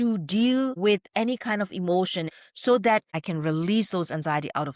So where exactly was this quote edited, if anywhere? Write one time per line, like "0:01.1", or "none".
0:02.3
0:03.2